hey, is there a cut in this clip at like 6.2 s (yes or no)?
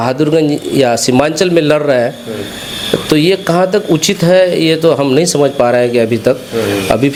no